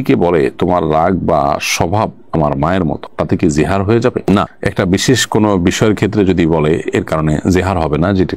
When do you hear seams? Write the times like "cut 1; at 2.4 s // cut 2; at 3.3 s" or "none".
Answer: none